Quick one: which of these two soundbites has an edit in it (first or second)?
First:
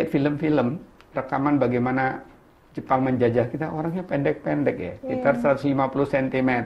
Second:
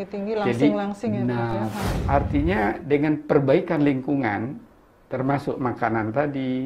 second